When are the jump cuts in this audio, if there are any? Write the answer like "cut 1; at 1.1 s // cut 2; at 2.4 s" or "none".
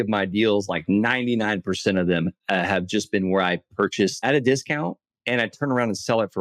cut 1; at 4.2 s